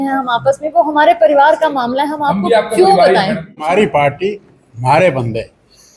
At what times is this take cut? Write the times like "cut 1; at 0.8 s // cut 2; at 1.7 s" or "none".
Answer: cut 1; at 3.6 s